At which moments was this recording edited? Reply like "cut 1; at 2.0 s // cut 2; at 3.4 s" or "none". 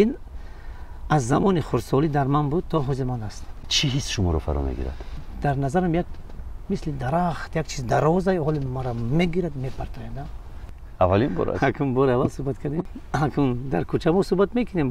cut 1; at 5.2 s // cut 2; at 10.7 s // cut 3; at 12.9 s